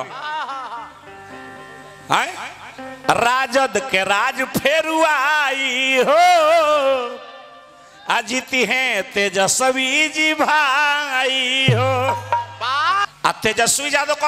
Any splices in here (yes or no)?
yes